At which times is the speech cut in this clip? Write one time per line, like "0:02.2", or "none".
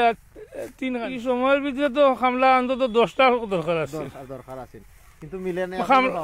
0:01.0